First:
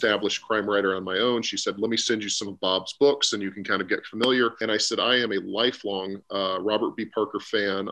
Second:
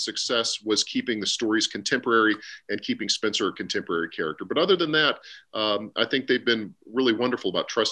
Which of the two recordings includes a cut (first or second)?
first